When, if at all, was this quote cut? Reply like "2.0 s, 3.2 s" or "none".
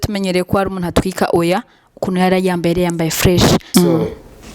3.7 s